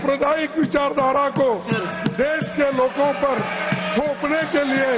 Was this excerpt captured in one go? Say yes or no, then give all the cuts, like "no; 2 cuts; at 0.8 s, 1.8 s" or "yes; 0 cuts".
yes; 0 cuts